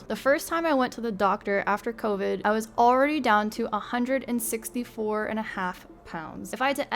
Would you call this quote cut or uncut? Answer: cut